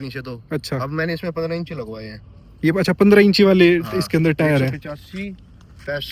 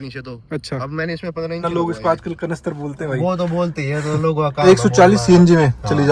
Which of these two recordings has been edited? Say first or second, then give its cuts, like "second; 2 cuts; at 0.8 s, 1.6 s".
second; 2 cuts; at 1.6 s, 4.7 s